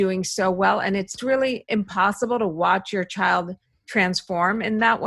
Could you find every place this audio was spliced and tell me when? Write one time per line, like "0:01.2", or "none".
0:01.2